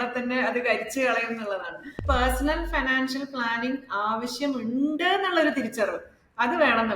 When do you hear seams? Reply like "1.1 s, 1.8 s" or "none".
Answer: 2.0 s

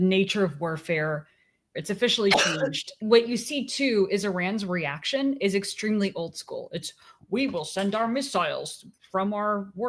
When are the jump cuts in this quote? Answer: 1.8 s, 3.0 s

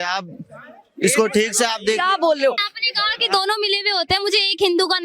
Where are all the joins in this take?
2.6 s

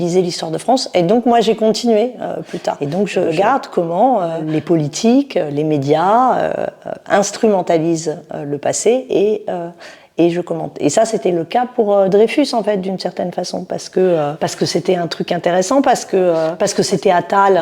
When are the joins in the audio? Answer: none

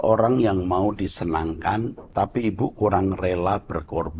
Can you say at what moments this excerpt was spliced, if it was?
2.0 s

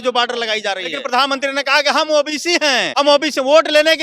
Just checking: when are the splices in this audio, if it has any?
1.0 s, 2.9 s

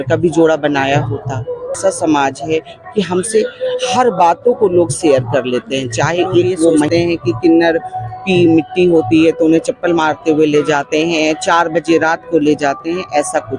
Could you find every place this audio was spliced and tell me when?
1.8 s, 6.9 s

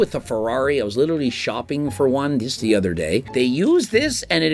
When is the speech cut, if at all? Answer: 3.3 s

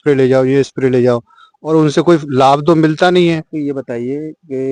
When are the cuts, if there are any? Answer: none

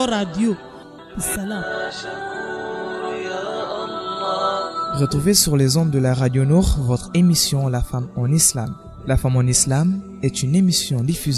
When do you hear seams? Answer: 1.0 s

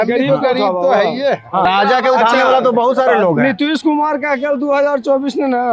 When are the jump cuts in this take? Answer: 1.7 s

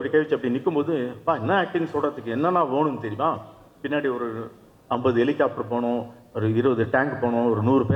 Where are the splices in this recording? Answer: none

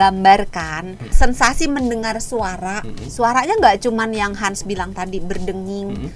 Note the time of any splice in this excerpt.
1.2 s

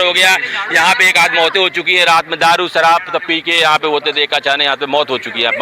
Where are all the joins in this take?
none

